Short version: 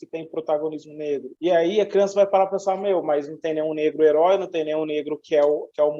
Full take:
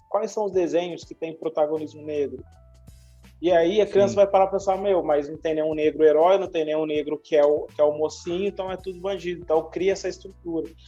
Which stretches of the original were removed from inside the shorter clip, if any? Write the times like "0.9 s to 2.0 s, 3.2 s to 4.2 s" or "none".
2.4 s to 3.3 s